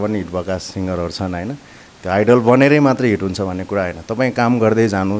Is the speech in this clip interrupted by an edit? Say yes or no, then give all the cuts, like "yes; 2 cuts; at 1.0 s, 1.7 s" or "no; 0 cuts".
no; 0 cuts